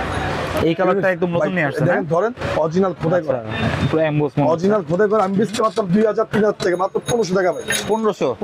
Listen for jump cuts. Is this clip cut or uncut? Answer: uncut